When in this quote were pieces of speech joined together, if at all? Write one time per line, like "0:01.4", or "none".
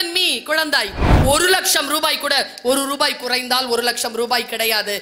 0:01.1